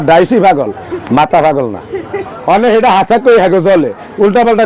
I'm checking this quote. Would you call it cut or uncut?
cut